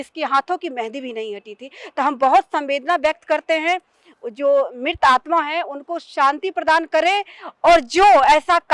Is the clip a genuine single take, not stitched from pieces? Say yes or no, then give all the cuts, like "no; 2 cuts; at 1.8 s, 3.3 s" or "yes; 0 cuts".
yes; 0 cuts